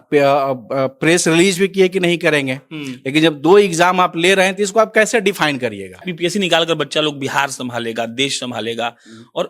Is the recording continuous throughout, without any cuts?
no; 1 cut; at 6.1 s

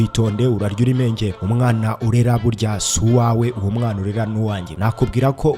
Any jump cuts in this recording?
yes; 2 cuts; at 1.4 s, 4.7 s

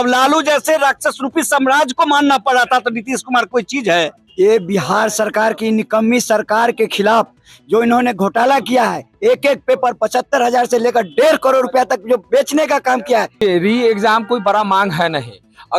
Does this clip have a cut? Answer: yes; 2 cuts; at 4.2 s, 13.4 s

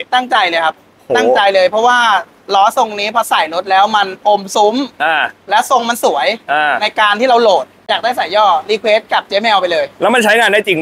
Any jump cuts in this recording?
yes; 1 cut; at 7.8 s

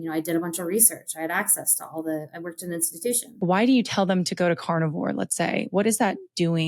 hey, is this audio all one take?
no; 1 cut; at 3.4 s

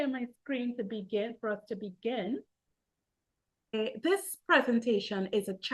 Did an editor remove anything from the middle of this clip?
yes; 1 cut; at 3.7 s

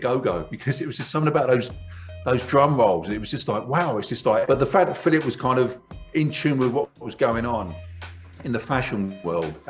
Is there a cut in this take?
yes; 1 cut; at 4.5 s

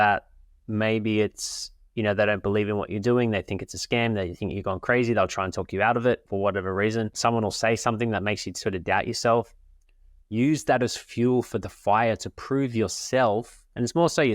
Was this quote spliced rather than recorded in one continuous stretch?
yes; 2 cuts; at 6.3 s, 7.2 s

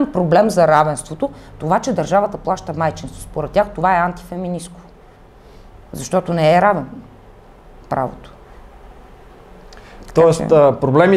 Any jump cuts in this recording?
no; 0 cuts

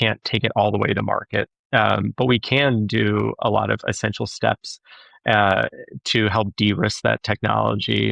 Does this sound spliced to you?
no; 0 cuts

